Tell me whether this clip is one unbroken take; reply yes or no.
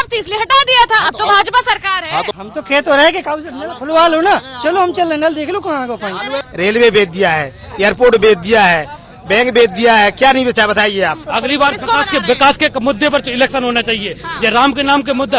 no